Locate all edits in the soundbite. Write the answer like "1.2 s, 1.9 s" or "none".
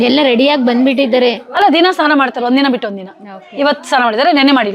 none